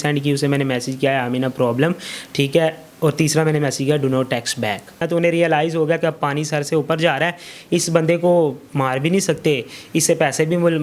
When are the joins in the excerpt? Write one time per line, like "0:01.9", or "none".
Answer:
0:05.1